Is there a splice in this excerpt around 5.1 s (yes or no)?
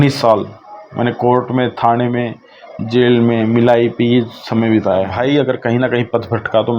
yes